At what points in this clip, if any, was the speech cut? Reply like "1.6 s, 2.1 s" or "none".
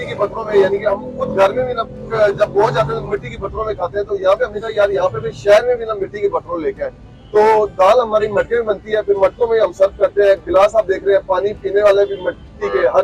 none